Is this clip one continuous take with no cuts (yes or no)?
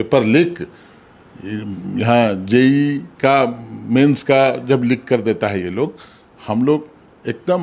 yes